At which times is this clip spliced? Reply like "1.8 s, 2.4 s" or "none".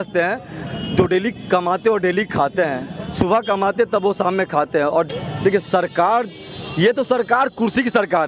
5.1 s